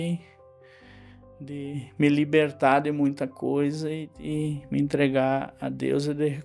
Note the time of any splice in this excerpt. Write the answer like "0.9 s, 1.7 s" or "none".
none